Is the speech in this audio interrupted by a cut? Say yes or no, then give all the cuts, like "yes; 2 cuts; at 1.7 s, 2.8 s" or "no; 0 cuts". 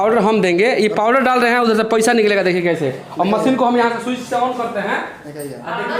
no; 0 cuts